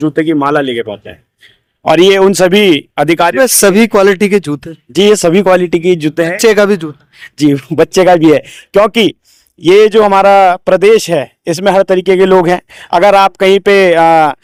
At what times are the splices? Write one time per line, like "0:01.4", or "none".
none